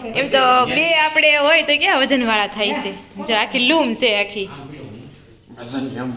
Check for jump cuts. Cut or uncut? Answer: uncut